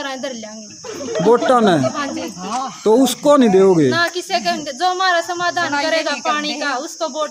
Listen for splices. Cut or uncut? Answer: uncut